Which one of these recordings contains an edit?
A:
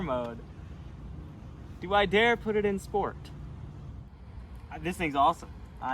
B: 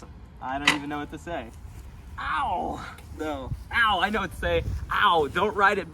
A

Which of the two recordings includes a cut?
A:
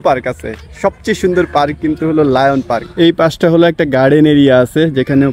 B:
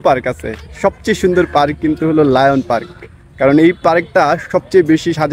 A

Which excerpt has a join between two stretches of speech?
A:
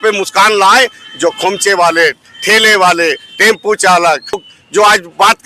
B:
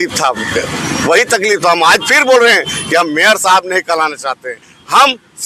A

